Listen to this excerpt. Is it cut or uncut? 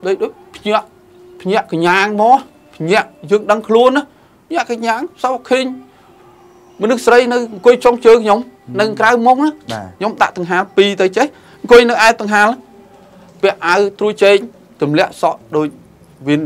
uncut